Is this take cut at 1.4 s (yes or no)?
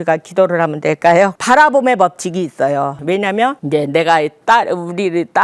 yes